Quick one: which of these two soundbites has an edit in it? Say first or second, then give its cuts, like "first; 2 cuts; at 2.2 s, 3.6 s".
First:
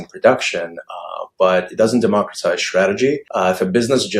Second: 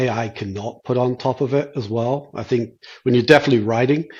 first; 1 cut; at 3.3 s